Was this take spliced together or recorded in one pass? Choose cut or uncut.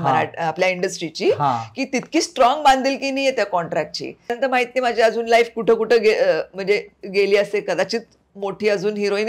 cut